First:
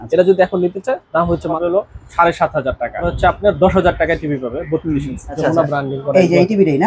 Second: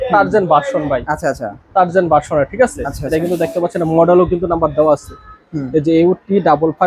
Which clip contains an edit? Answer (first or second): first